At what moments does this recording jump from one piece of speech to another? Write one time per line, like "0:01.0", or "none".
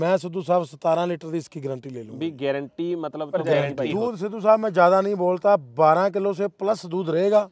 0:03.8